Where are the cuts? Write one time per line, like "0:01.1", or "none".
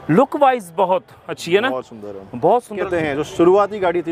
0:02.8